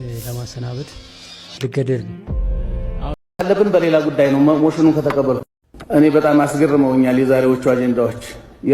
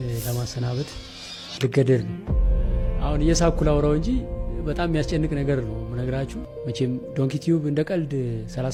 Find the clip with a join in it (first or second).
first